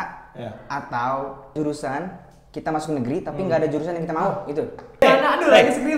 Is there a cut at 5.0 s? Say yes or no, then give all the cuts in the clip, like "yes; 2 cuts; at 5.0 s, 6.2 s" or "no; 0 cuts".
yes; 2 cuts; at 1.5 s, 5.0 s